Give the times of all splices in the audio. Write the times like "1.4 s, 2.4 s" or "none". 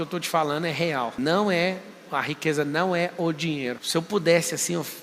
1.1 s, 3.8 s

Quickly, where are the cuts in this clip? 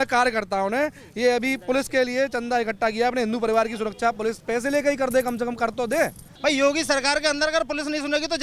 6.3 s

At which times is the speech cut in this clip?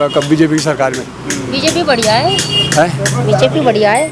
none

